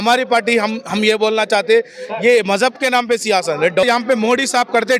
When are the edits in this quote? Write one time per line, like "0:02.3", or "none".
0:03.8